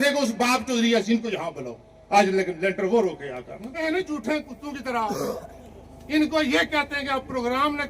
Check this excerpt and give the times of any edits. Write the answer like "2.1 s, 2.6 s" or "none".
3.8 s